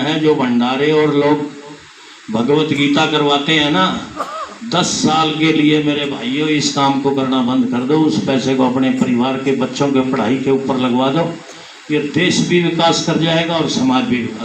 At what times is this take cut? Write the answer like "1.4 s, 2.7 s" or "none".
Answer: none